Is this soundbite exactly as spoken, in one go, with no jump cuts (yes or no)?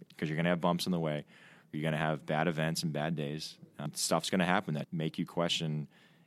no